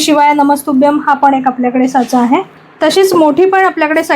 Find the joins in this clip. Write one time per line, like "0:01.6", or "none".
0:02.6